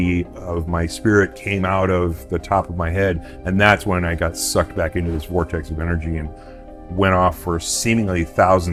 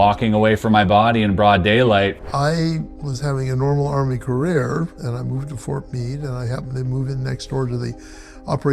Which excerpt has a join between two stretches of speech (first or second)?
second